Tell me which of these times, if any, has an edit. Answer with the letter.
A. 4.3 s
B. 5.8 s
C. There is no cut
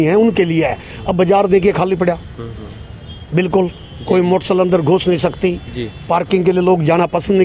C